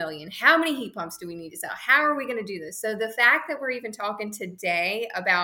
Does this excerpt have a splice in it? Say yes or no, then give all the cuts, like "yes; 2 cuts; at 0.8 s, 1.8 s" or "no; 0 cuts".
no; 0 cuts